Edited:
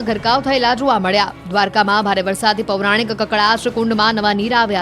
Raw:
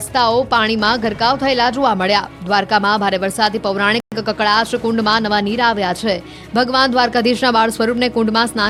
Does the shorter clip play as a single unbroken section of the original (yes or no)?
no